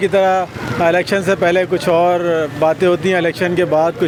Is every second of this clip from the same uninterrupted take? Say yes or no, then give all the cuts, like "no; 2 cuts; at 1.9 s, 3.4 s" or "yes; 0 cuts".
yes; 0 cuts